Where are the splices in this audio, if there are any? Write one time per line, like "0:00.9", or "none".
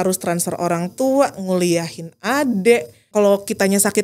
0:03.0